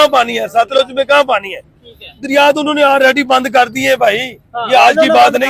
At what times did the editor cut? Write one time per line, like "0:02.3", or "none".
none